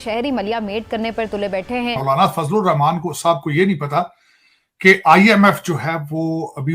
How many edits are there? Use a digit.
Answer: 1